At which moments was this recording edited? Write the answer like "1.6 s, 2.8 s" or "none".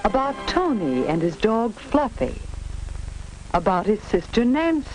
2.7 s